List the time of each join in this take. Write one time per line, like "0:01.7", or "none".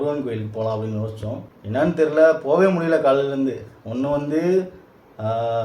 0:01.5

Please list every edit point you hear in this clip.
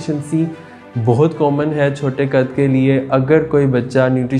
none

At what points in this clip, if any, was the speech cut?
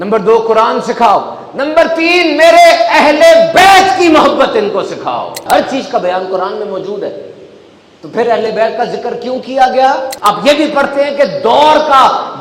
0:05.4
0:10.1

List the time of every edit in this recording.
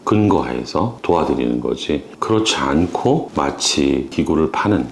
0:01.0
0:04.1

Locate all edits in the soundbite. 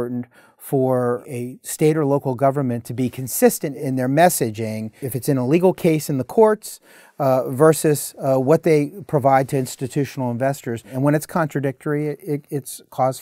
0:01.3
0:03.7
0:05.1
0:10.9

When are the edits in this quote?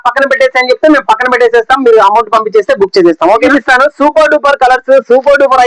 0:03.5

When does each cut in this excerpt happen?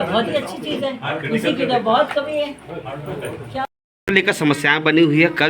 0:03.9

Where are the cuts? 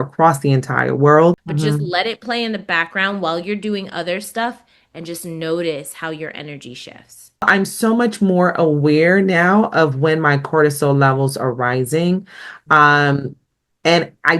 0:01.5
0:07.5

